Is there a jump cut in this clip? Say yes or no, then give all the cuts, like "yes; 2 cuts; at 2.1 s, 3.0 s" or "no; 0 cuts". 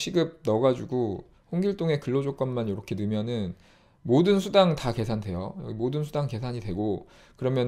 no; 0 cuts